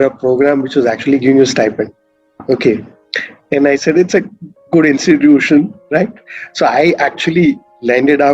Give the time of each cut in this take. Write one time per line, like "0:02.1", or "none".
none